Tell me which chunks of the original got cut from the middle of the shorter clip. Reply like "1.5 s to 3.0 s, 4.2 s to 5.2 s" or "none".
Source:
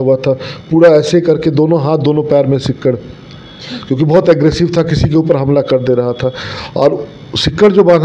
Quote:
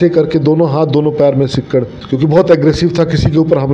3.1 s to 3.7 s